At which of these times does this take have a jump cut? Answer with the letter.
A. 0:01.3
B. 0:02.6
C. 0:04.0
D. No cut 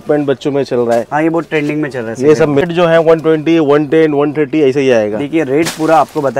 B